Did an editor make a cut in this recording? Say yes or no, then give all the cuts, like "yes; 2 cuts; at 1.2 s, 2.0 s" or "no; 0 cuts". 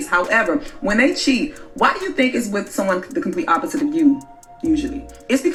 no; 0 cuts